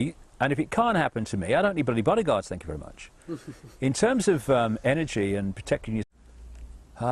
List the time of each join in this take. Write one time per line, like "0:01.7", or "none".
none